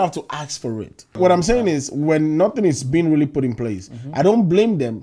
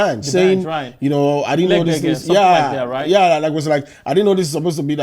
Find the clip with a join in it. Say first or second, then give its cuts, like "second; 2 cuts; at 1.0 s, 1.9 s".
first; 1 cut; at 1.2 s